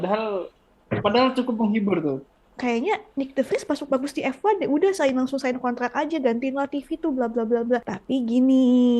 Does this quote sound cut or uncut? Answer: cut